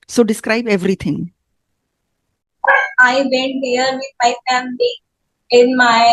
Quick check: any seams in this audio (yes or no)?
no